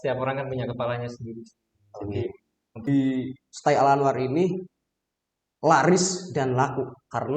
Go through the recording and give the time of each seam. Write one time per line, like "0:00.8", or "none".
0:02.7